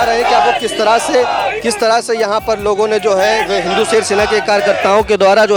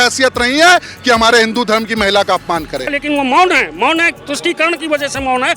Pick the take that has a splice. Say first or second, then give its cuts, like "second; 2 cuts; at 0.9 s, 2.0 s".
second; 1 cut; at 2.9 s